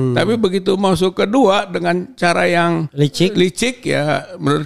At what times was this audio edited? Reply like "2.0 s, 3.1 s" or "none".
2.9 s